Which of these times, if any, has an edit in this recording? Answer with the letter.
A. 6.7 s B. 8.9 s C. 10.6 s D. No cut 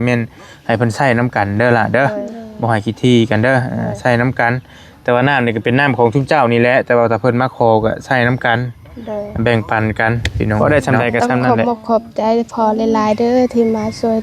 C